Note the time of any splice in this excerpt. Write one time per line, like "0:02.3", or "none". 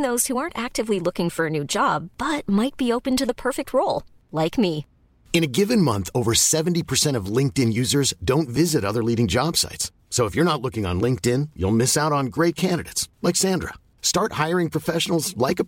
none

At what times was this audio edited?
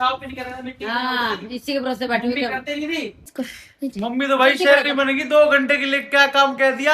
0:03.3

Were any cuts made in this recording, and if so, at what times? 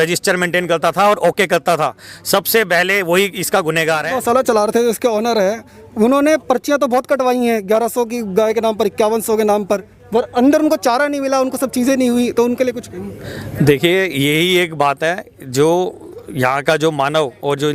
none

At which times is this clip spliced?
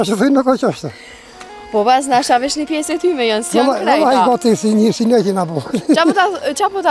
none

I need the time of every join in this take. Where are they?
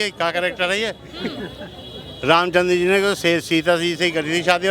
none

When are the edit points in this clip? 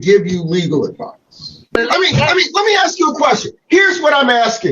0:01.7

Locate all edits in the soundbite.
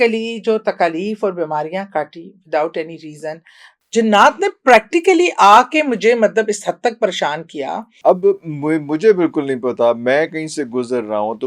0:03.7
0:07.9

